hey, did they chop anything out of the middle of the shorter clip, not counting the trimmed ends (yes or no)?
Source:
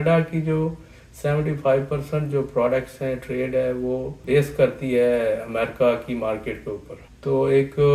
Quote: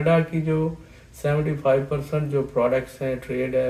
no